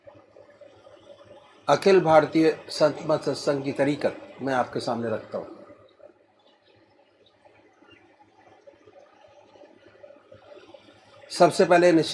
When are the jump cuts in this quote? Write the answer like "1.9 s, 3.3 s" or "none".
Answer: 2.3 s